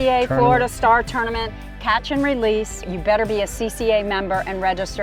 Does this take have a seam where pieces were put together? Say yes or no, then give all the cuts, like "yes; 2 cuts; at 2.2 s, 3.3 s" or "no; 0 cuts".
yes; 1 cut; at 2.8 s